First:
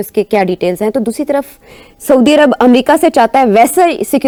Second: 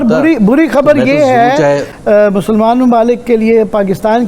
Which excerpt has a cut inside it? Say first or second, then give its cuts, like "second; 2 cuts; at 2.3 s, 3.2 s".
second; 1 cut; at 1.9 s